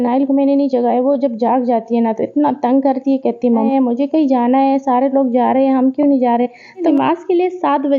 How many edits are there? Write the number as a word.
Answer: two